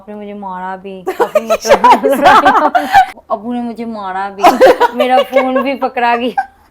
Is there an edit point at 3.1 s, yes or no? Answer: yes